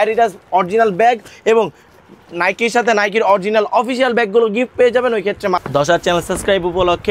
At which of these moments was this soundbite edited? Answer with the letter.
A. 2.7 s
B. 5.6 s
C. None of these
B